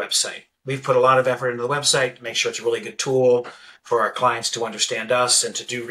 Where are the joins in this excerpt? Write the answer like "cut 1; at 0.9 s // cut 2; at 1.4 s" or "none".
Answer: none